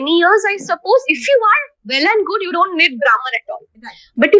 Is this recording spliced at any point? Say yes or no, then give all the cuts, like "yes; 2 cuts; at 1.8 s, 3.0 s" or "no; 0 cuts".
no; 0 cuts